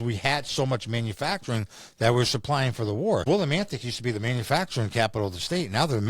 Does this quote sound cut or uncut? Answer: cut